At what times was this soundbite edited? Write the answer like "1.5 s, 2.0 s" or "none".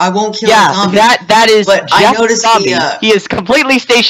none